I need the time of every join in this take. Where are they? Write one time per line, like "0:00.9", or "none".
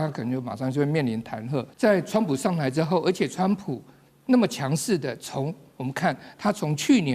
0:01.7